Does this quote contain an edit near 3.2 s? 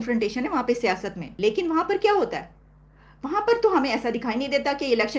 no; 1 cut; at 1.2 s

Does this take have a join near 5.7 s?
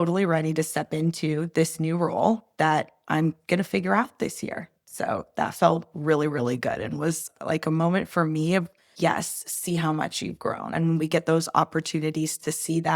no; 2 cuts; at 8.9 s, 10.7 s

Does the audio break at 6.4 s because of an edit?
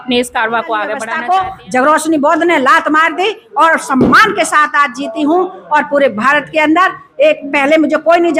no; 1 cut; at 1.1 s

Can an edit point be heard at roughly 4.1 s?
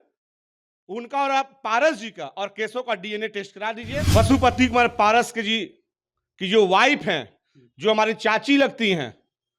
yes; 1 cut; at 4.1 s

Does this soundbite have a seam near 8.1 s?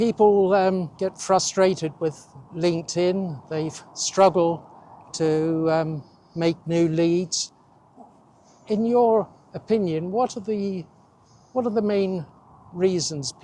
no; 1 cut; at 0.9 s

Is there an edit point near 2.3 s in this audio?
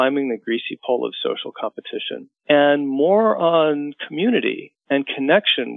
yes; 1 cut; at 2.3 s

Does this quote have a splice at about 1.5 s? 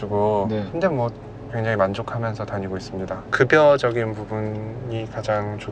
yes; 2 cuts; at 1.5 s, 3.2 s

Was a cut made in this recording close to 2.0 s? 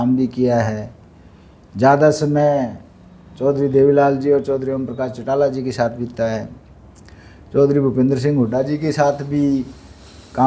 no; 0 cuts

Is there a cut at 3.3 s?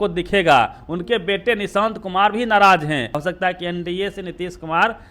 yes; 1 cut; at 3.3 s

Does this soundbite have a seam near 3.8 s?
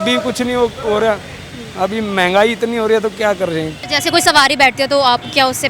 yes; 1 cut; at 3.8 s

